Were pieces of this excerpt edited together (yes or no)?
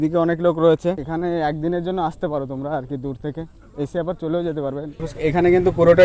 yes